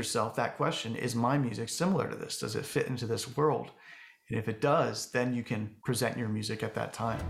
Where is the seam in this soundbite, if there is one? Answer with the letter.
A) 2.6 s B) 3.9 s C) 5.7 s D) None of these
C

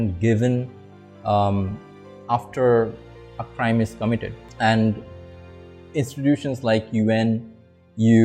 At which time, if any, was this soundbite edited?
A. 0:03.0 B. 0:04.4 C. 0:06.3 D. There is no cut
B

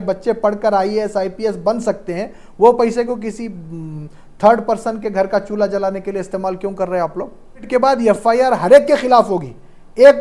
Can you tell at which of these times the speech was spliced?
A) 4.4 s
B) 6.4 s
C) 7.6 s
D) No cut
C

